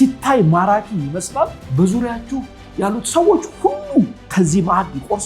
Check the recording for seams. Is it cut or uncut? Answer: cut